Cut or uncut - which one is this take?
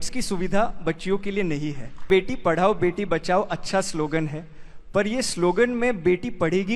cut